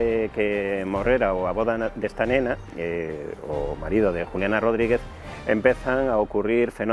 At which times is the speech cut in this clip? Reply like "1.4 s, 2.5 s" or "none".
none